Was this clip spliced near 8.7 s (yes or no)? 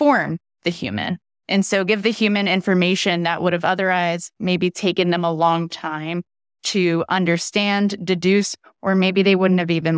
no